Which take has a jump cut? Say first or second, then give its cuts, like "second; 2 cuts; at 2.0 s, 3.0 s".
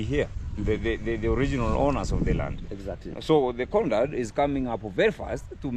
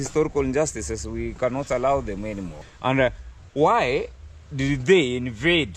second; 1 cut; at 2.7 s